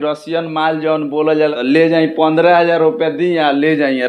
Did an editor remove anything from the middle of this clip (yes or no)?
yes